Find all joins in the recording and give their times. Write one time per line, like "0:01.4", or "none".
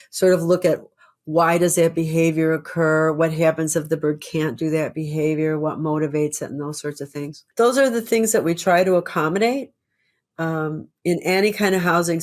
0:07.4